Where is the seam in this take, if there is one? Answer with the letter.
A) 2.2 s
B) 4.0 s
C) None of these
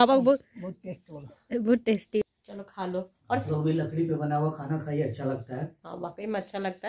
A